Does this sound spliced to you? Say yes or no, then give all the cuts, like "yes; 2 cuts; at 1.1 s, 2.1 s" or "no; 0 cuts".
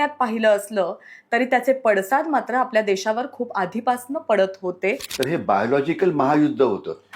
yes; 1 cut; at 5.1 s